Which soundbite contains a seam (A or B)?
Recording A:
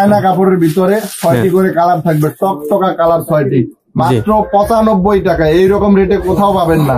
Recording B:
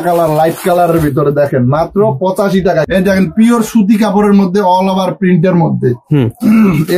B